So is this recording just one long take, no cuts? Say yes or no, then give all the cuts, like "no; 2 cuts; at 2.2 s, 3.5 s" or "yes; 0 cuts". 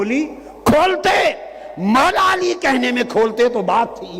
yes; 0 cuts